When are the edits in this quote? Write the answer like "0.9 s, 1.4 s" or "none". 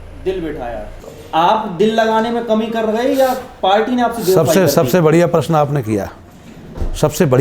0.9 s